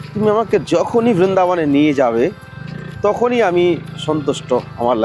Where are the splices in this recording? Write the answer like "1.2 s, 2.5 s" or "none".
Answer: none